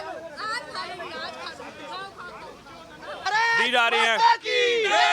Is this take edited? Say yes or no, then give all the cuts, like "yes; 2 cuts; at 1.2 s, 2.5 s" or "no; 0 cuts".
yes; 1 cut; at 3.2 s